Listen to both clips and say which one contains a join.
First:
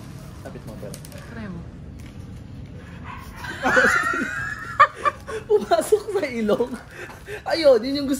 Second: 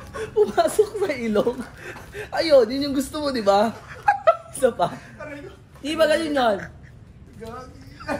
first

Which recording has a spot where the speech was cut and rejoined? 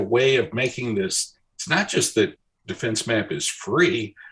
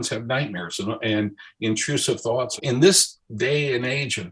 second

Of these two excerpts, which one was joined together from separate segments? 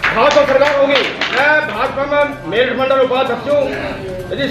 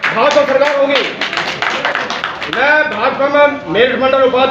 first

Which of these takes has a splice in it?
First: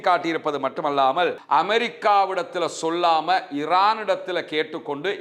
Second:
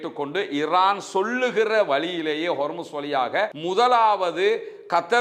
first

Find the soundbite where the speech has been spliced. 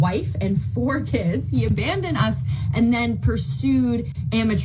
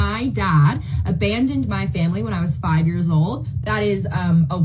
second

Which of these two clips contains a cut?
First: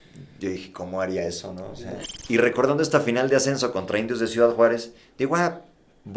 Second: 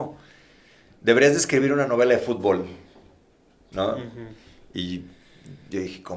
first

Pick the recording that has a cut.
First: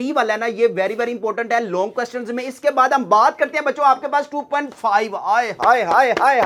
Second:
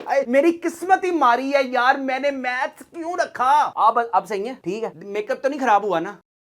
second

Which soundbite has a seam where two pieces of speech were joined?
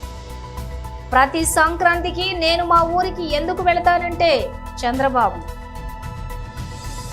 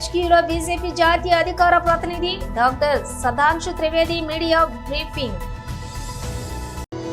first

